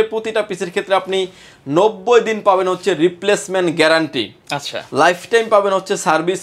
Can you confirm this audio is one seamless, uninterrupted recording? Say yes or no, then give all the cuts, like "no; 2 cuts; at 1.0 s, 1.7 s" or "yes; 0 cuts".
yes; 0 cuts